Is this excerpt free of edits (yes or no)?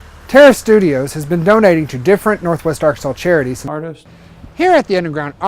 no